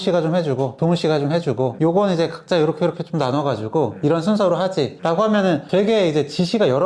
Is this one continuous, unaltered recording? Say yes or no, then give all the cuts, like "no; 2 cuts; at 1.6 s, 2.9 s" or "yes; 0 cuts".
yes; 0 cuts